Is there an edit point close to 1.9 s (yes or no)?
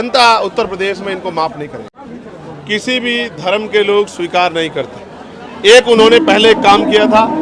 yes